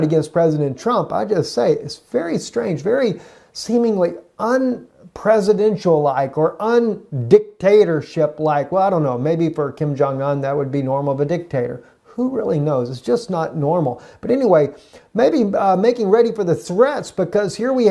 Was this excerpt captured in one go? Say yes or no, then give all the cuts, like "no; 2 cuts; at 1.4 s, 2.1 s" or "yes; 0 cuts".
no; 1 cut; at 2.5 s